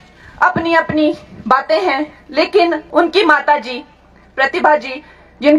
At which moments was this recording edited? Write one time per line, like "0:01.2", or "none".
0:02.8